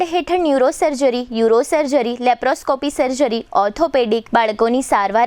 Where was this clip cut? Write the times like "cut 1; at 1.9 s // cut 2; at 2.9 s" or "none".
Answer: none